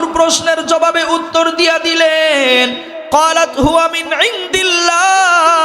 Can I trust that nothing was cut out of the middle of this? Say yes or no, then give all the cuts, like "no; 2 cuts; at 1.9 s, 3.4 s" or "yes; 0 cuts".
no; 1 cut; at 2.9 s